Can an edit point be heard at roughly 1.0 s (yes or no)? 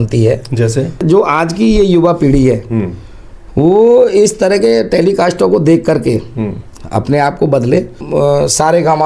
yes